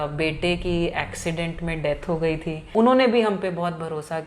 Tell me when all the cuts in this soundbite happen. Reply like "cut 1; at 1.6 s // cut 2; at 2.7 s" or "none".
cut 1; at 2.6 s